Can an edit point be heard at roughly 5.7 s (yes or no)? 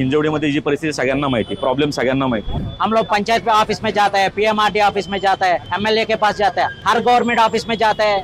yes